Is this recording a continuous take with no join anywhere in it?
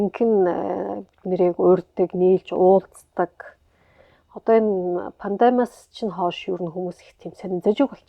yes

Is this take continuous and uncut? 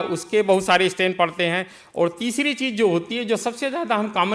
yes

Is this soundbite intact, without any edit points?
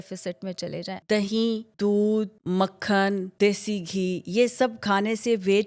no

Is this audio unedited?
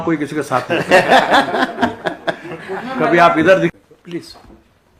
no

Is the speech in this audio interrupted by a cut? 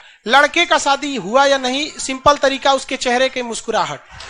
no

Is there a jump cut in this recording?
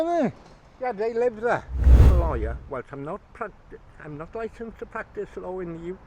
yes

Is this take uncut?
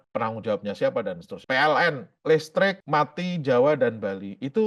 no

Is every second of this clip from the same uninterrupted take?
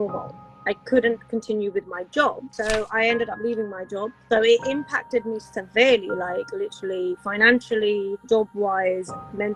no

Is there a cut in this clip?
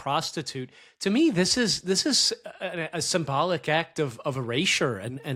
no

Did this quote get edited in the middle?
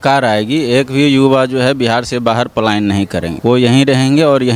no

